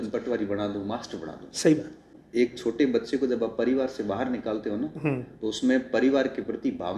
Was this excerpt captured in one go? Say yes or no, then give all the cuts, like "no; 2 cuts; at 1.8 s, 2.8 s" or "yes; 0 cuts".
no; 1 cut; at 2.2 s